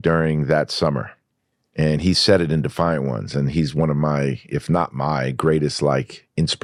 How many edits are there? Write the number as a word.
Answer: zero